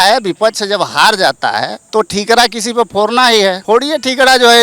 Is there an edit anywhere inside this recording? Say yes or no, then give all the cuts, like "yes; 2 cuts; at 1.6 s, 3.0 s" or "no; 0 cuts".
yes; 2 cuts; at 1.8 s, 3.6 s